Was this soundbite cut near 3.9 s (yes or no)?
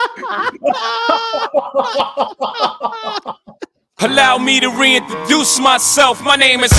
yes